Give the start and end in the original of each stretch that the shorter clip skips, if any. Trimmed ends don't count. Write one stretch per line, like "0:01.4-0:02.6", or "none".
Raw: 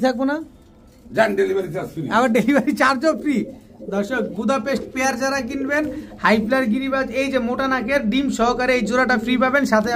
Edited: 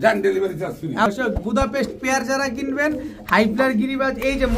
0:02.2-0:04.0

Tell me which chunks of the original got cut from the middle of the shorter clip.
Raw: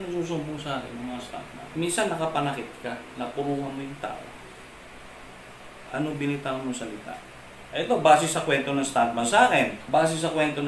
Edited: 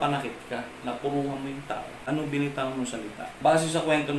0:04.3-0:05.8
0:07.2-0:09.8

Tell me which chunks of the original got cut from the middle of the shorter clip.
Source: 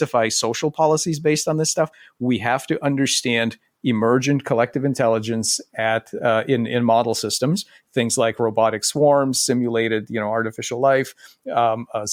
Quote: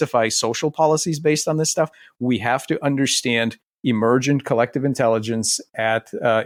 none

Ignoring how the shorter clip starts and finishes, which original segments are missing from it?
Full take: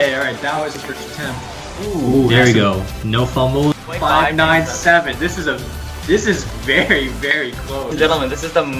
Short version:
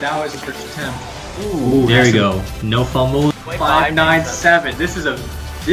none

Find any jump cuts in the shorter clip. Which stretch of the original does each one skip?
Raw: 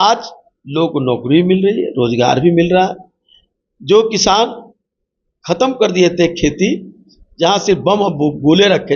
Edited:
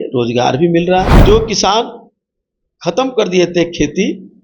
0:03.0-0:03.8

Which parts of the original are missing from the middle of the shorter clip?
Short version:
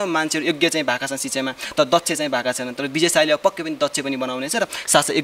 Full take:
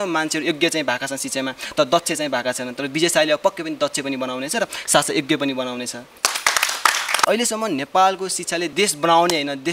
none

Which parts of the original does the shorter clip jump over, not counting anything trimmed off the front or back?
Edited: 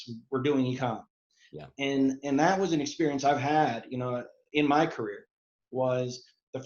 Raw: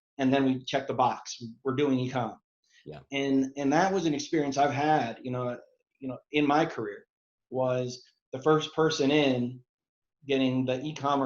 0:05.7-0:06.1

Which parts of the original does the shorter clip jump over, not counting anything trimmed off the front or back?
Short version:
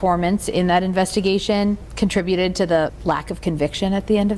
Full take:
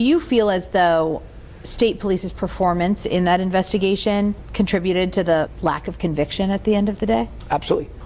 none

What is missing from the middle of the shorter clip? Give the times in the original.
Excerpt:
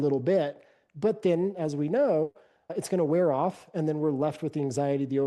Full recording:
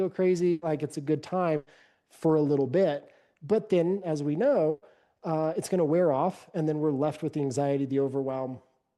0:05.2-0:05.5

